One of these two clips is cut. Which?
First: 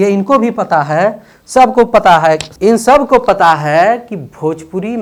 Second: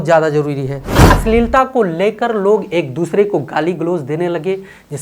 second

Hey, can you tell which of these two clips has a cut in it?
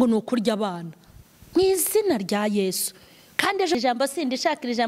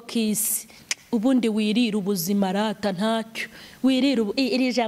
first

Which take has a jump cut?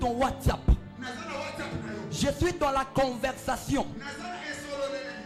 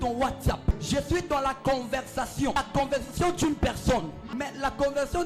second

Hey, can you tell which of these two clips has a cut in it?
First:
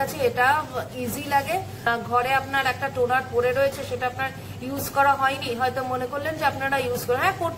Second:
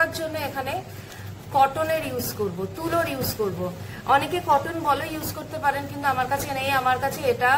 first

